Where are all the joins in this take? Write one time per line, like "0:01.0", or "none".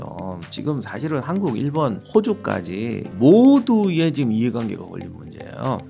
0:02.0
0:03.1